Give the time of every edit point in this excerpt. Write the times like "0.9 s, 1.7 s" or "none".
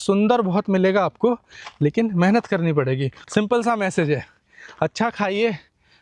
3.1 s